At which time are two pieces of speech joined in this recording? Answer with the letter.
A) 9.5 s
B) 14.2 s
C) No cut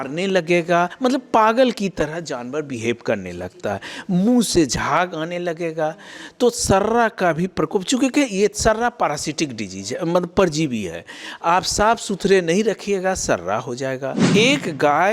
B